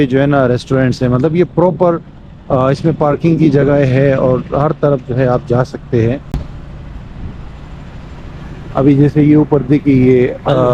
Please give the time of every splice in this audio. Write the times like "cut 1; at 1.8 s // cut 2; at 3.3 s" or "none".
none

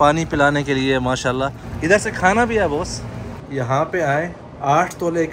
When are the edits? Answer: cut 1; at 1.7 s // cut 2; at 3.5 s

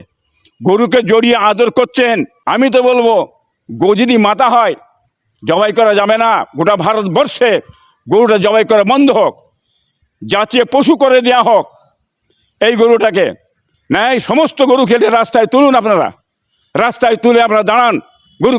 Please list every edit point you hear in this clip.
cut 1; at 2.4 s

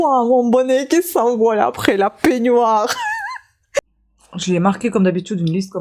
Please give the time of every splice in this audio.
cut 1; at 3.8 s

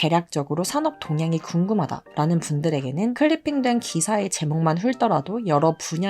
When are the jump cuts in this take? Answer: cut 1; at 3.2 s

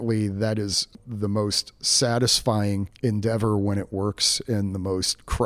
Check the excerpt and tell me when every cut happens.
cut 1; at 2.9 s

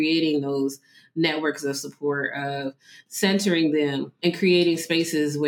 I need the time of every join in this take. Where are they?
cut 1; at 4.2 s

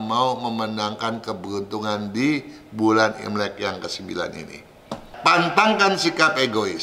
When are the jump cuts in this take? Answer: cut 1; at 5.1 s

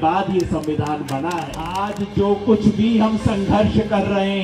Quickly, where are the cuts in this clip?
cut 1; at 1.8 s

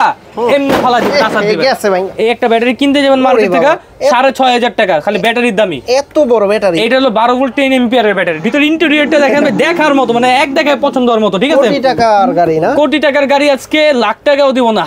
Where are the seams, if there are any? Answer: cut 1; at 2.1 s // cut 2; at 8.4 s

